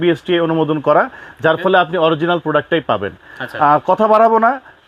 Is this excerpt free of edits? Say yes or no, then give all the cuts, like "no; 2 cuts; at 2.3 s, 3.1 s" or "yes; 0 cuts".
yes; 0 cuts